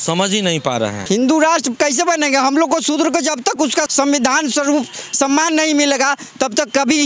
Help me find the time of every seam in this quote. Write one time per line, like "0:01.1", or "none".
0:01.0
0:03.7